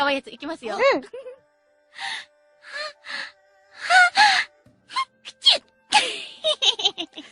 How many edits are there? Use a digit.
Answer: 1